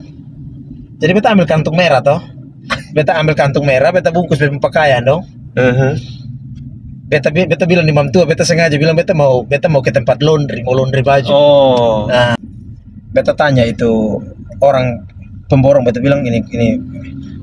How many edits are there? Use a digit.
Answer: 1